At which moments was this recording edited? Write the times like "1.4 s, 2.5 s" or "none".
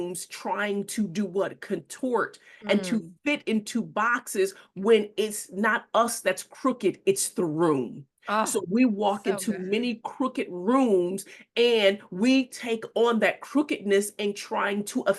none

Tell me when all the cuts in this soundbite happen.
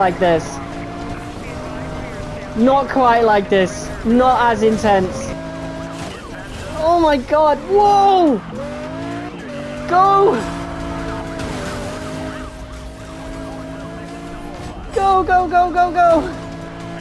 5.3 s

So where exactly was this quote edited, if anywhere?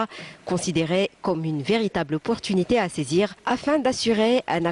3.5 s

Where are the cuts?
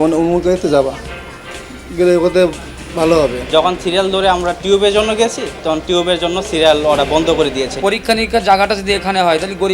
3.4 s, 7.7 s

